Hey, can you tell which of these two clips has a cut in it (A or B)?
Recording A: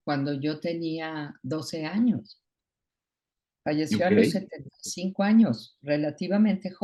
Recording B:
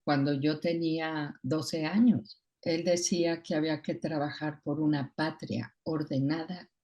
B